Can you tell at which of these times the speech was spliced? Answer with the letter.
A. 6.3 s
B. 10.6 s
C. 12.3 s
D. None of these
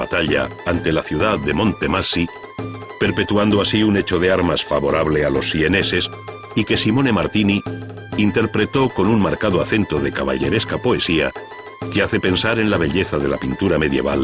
D